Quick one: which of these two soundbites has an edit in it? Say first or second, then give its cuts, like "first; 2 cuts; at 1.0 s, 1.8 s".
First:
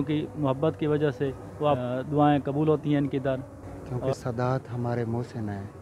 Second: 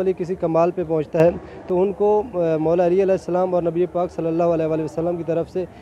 first; 2 cuts; at 1.8 s, 4.0 s